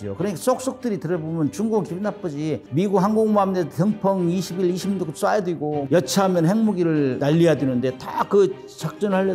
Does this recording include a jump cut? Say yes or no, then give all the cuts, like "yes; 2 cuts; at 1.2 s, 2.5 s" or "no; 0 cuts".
no; 0 cuts